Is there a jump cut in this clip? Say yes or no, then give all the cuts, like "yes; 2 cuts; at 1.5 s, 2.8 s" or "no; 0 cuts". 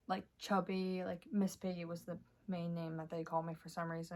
no; 0 cuts